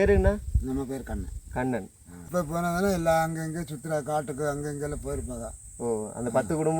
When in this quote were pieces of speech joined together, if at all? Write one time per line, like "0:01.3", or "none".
0:02.3